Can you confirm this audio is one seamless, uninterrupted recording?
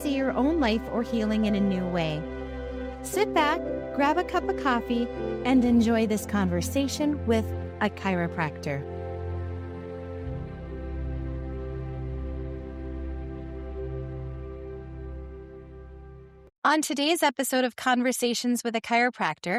yes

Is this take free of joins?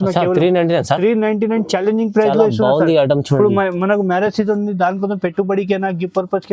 yes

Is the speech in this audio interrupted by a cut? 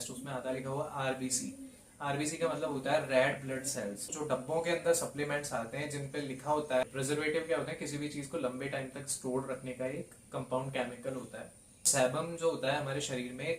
yes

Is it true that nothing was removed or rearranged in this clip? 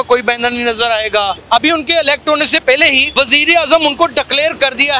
no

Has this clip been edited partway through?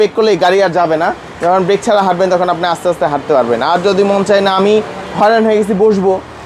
no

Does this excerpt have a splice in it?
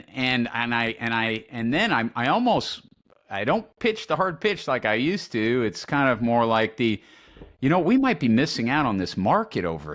no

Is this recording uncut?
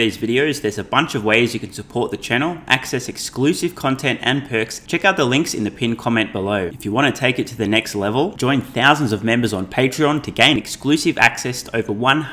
no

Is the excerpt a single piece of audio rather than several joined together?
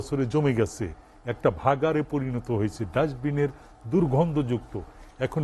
yes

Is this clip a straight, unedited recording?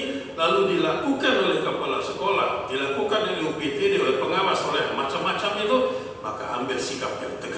yes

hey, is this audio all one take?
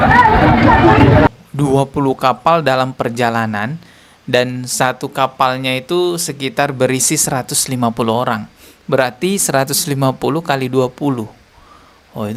no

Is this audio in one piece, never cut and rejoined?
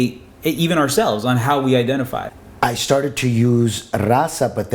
no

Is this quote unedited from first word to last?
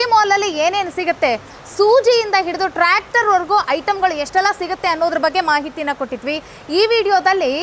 yes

